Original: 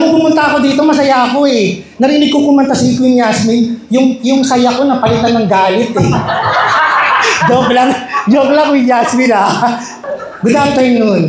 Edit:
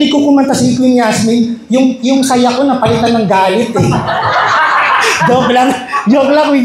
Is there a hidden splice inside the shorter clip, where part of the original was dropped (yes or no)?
no